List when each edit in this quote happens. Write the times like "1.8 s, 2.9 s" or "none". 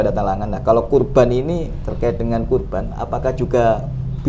none